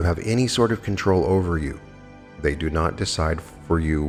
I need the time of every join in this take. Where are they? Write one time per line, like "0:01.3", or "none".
none